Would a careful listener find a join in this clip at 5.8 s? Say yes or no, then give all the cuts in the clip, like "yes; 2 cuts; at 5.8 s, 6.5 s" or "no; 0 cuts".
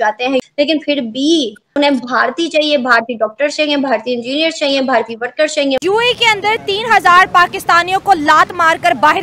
yes; 1 cut; at 5.8 s